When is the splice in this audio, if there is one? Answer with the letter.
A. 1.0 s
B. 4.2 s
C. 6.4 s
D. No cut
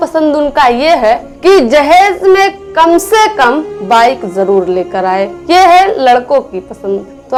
D